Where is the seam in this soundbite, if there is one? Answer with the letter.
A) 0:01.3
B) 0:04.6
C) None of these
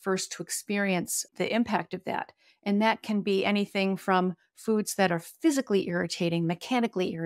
A